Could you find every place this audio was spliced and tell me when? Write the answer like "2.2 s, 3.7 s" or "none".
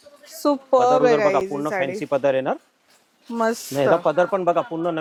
none